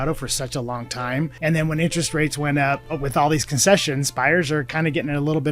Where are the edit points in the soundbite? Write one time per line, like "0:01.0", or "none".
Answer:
0:01.3
0:02.9
0:04.7